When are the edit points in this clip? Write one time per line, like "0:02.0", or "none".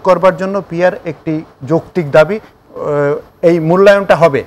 0:02.5